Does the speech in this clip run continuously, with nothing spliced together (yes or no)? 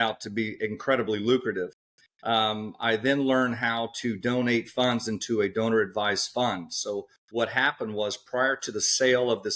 yes